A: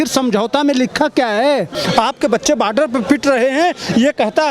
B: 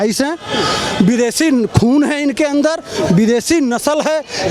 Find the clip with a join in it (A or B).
A